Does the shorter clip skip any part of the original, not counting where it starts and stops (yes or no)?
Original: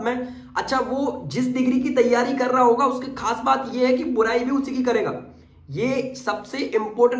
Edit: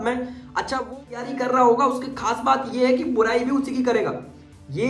yes